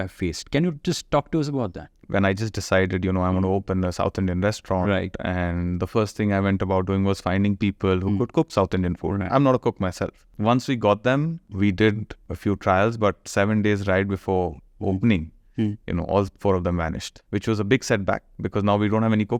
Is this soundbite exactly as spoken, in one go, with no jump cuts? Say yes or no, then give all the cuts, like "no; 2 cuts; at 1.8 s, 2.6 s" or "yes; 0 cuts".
no; 5 cuts; at 2.0 s, 10.3 s, 11.5 s, 12.2 s, 17.1 s